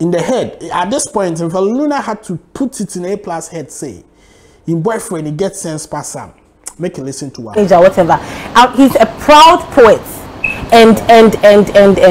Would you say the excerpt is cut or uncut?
uncut